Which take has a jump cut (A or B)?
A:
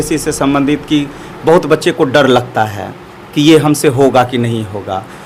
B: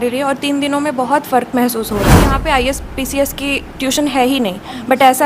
B